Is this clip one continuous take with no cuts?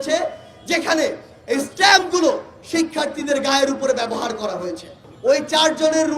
no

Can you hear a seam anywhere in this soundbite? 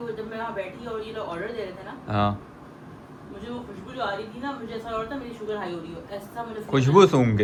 no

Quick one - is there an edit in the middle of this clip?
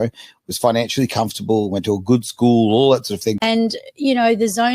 yes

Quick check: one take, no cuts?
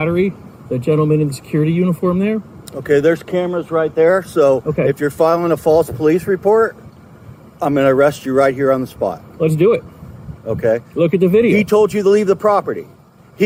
yes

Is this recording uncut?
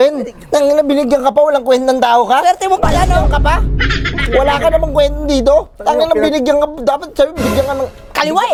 yes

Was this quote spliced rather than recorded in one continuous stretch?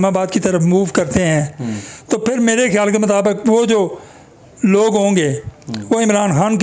no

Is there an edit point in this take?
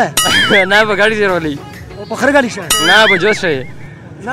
no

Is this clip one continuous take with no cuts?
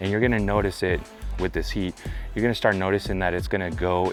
yes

